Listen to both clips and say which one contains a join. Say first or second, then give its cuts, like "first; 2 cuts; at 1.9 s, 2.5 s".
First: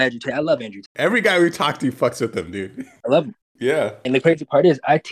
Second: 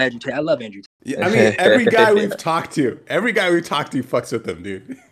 first; 3 cuts; at 0.9 s, 2.9 s, 4.0 s